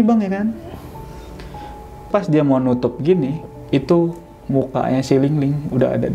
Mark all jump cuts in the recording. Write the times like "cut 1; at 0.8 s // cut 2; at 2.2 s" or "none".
cut 1; at 2.1 s